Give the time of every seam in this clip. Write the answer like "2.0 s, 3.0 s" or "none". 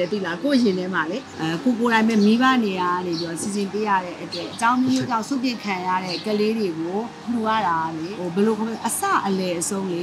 1.3 s, 4.5 s, 6.1 s, 7.2 s, 8.1 s